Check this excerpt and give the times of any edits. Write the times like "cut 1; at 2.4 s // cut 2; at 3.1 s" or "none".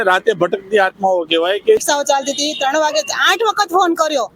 cut 1; at 1.8 s